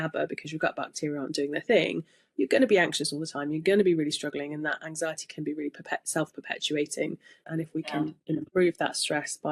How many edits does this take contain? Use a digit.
1